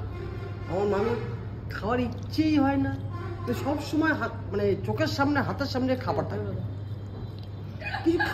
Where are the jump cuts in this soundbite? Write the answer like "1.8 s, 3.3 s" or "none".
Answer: none